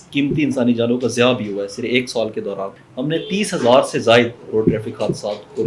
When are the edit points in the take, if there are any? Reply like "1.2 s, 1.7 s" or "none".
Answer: 2.7 s